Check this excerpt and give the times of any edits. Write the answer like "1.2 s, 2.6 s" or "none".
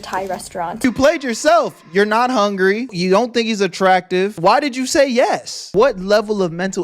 0.8 s, 2.9 s, 5.6 s